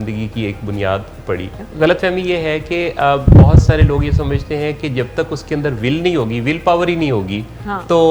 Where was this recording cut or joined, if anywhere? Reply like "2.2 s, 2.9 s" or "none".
1.6 s